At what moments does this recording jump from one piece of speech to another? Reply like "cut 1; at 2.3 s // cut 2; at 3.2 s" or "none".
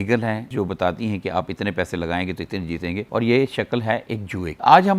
none